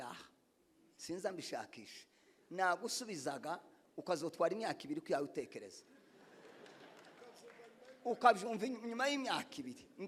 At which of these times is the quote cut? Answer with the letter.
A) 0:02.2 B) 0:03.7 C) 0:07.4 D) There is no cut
D